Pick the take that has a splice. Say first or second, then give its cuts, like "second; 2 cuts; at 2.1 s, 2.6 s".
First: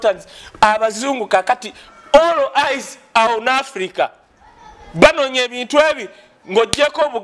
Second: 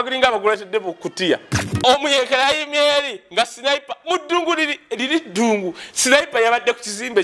second; 1 cut; at 1.6 s